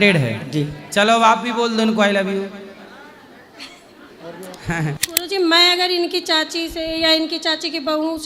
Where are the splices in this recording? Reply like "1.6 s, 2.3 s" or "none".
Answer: 5.0 s